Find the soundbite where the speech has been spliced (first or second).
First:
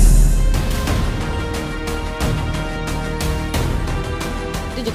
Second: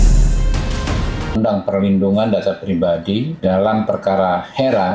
second